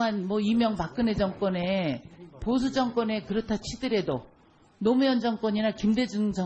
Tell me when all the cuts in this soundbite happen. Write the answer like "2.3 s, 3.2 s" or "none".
5.0 s